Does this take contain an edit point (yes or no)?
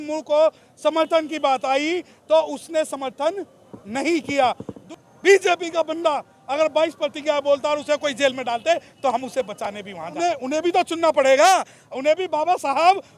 yes